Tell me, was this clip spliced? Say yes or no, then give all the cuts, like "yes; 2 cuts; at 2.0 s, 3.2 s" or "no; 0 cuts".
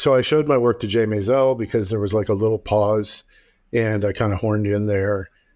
no; 0 cuts